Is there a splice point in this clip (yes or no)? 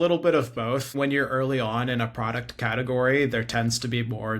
yes